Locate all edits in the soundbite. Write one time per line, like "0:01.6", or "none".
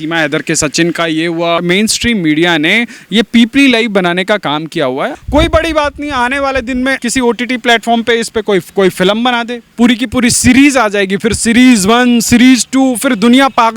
0:01.6
0:05.2
0:07.0
0:09.7